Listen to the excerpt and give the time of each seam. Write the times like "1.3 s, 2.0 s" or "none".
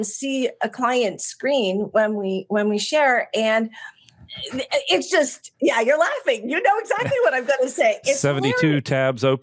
none